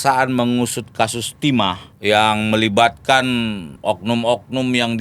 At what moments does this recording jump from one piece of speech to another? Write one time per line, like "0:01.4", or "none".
0:01.9
0:03.7